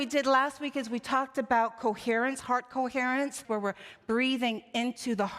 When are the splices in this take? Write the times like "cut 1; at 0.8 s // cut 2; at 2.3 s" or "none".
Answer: cut 1; at 3.4 s